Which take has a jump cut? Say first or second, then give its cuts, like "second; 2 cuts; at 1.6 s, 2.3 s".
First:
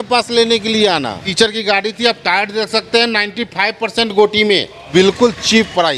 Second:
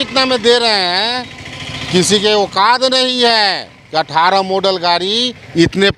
first; 2 cuts; at 1.2 s, 4.8 s